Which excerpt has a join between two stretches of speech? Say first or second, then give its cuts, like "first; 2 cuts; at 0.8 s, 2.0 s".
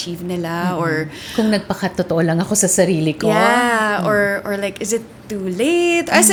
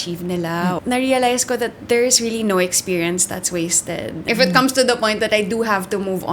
second; 2 cuts; at 0.8 s, 4.2 s